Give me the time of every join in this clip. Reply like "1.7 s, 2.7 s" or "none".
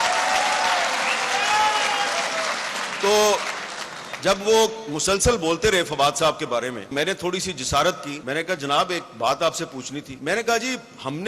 6.9 s, 8.1 s, 10.1 s